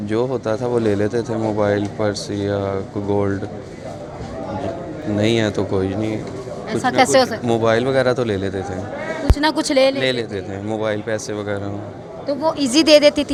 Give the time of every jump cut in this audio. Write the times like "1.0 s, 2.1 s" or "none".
none